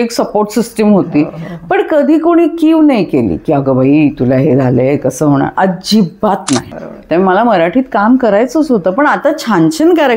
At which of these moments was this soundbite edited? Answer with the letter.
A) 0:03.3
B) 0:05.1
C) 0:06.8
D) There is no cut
C